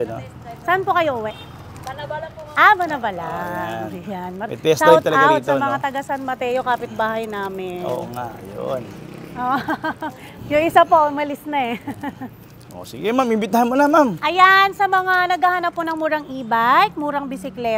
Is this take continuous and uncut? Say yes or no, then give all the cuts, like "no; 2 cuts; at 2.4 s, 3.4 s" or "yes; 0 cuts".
yes; 0 cuts